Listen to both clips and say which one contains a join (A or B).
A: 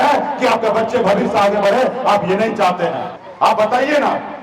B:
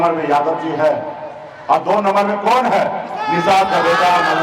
A